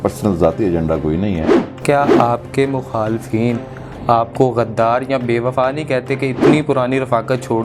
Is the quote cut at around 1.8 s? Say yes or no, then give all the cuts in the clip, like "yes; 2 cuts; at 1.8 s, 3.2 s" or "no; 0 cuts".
yes; 1 cut; at 1.8 s